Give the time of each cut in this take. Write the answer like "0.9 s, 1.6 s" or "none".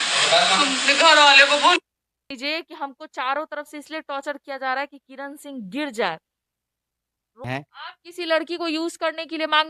2.3 s, 7.4 s